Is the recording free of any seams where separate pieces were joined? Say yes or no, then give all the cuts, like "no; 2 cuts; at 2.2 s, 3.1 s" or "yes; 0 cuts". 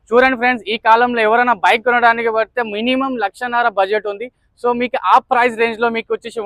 yes; 0 cuts